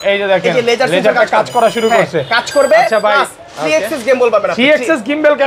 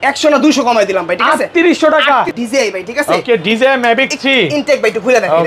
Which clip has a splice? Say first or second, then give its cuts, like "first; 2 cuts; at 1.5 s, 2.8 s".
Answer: second; 1 cut; at 2.3 s